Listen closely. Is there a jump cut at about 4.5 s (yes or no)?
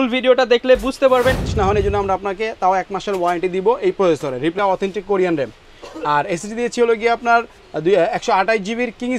yes